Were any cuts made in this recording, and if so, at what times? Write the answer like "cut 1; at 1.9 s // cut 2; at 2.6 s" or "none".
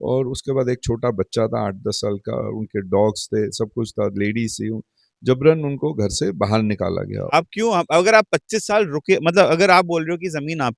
cut 1; at 7.3 s